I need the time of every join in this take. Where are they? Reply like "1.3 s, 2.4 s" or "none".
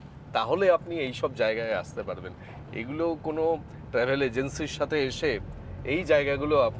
none